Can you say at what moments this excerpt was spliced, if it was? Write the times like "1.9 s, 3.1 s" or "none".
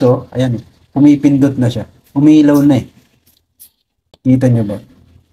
none